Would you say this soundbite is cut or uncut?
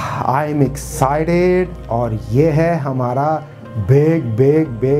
uncut